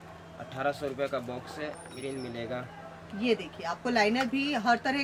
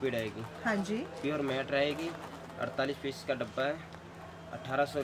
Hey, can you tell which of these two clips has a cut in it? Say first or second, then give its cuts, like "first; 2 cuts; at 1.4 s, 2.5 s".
first; 1 cut; at 1.9 s